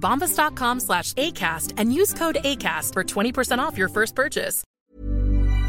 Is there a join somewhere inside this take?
yes; 1 cut; at 4.6 s

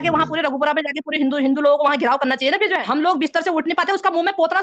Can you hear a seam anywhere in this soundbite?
yes; 1 cut; at 2.8 s

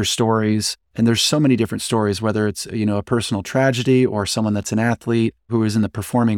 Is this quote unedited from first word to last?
no; 2 cuts; at 1.1 s, 5.5 s

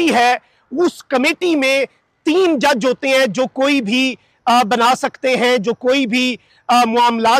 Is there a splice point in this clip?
no; 0 cuts

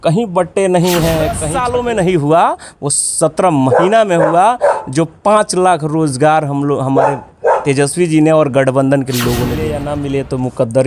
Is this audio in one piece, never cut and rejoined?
no; 2 cuts; at 1.5 s, 9.8 s

